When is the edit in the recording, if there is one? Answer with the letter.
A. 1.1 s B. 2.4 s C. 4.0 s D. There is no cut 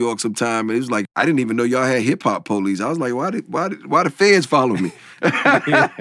A